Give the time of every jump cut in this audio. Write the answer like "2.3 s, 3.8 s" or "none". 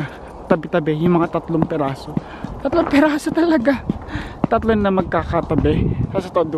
none